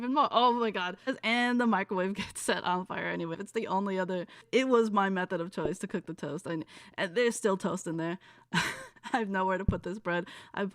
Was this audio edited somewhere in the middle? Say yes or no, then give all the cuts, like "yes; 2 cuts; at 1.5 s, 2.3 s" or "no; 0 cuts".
yes; 3 cuts; at 1.1 s, 3.4 s, 4.4 s